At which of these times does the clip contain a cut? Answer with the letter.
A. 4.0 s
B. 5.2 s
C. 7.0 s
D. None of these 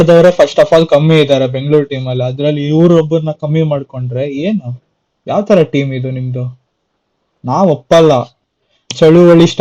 D